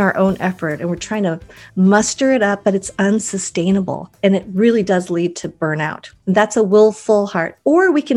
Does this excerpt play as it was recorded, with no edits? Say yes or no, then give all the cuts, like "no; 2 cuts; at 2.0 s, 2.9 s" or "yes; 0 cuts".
no; 2 cuts; at 4.0 s, 6.1 s